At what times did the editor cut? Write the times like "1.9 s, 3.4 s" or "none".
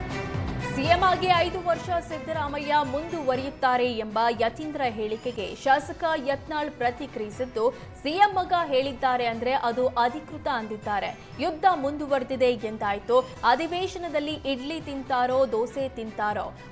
none